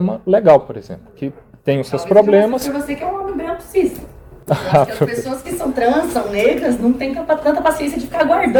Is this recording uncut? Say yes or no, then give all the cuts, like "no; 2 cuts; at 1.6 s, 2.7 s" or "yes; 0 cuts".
yes; 0 cuts